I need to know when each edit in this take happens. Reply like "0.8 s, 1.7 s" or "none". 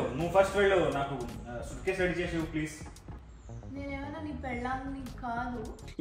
none